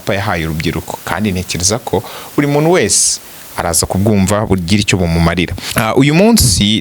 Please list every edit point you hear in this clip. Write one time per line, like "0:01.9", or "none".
0:05.6